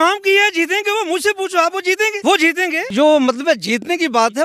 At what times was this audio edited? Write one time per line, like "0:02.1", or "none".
0:02.7